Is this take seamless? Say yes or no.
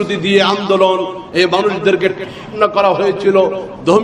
yes